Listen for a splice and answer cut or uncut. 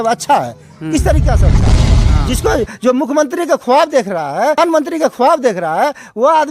cut